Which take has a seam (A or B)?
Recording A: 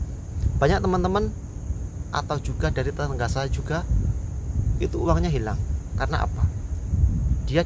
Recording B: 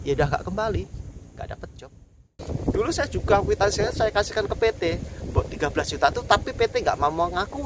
B